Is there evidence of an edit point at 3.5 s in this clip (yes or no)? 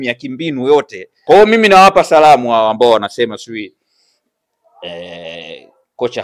no